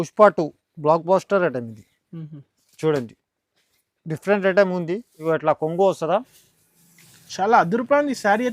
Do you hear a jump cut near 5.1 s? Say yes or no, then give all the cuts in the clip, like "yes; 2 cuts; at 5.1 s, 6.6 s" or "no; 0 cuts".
yes; 1 cut; at 5.1 s